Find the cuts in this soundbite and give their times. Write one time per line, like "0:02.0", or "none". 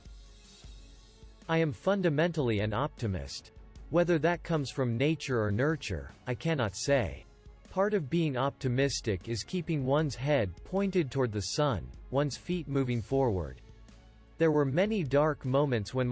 0:01.5